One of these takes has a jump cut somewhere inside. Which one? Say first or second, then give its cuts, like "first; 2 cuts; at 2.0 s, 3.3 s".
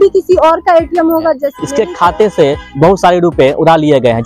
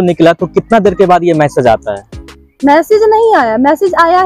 first; 1 cut; at 1.5 s